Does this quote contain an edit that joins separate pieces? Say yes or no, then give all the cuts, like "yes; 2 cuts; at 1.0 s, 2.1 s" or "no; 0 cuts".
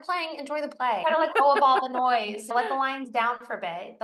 yes; 2 cuts; at 1.0 s, 2.5 s